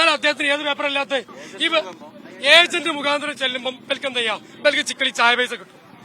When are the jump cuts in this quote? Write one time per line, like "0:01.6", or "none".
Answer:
0:01.4